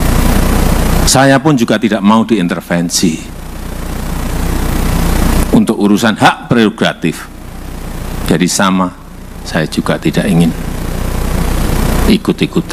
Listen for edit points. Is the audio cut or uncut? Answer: uncut